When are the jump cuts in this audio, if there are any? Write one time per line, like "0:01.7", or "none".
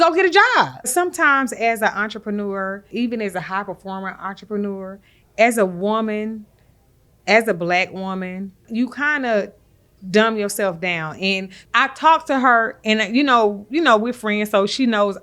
0:00.9
0:02.9
0:08.6
0:11.5